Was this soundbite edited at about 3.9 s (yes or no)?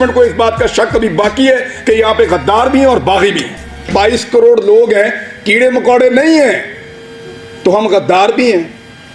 yes